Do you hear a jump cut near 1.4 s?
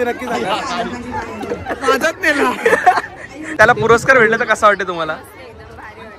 no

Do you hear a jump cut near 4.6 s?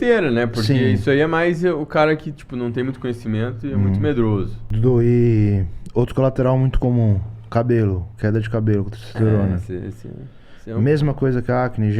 yes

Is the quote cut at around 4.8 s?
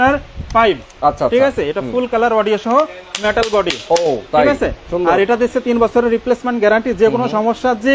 no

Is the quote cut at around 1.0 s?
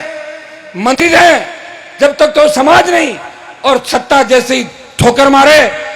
yes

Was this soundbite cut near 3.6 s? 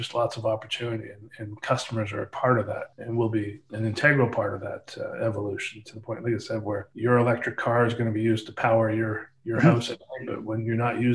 yes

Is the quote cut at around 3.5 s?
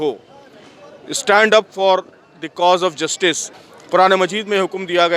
yes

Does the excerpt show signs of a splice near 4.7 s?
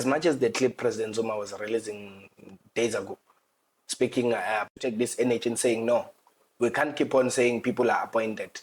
yes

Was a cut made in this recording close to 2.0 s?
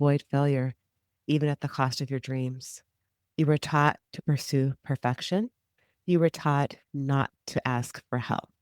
no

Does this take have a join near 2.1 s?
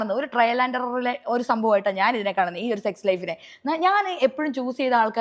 yes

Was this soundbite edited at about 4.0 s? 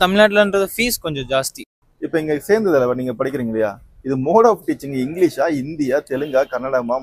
no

